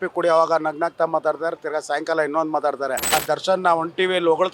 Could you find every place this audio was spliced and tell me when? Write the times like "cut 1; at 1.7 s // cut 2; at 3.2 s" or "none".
cut 1; at 3.1 s